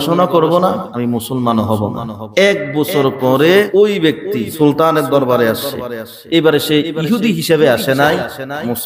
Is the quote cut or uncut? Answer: cut